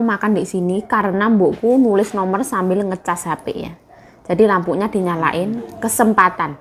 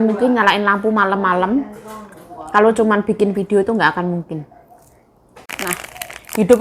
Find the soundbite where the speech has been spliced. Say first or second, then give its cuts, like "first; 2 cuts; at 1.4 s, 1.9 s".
second; 1 cut; at 5.4 s